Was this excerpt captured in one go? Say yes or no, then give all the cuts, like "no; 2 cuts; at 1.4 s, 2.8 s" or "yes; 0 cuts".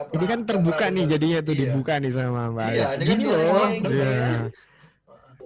yes; 0 cuts